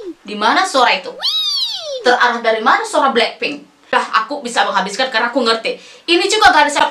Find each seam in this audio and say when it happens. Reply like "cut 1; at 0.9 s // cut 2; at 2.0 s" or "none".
cut 1; at 3.9 s